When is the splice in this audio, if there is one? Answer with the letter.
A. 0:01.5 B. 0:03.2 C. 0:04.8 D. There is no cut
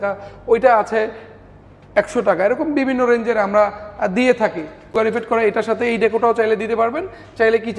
C